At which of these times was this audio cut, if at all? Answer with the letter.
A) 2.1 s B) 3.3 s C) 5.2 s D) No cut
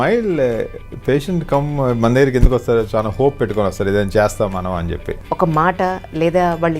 C